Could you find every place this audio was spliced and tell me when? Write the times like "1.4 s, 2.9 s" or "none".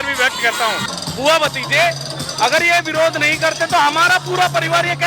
0.9 s